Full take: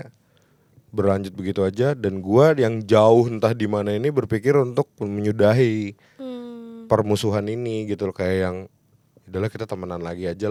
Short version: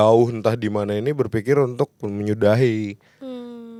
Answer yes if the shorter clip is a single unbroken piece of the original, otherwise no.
yes